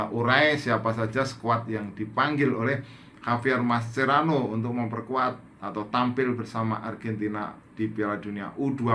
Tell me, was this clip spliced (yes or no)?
no